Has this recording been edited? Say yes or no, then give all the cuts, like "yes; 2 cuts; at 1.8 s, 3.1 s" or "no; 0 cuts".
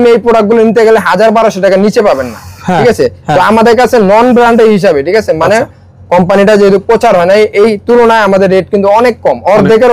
no; 0 cuts